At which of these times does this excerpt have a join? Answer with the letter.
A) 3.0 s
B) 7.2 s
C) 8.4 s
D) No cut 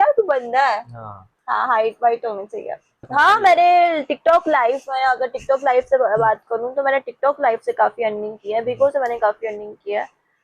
A